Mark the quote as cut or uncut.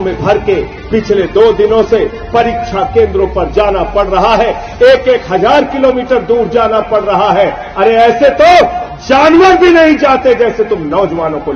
uncut